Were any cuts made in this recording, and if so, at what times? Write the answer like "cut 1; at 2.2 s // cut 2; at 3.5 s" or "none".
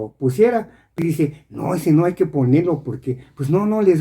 cut 1; at 1.0 s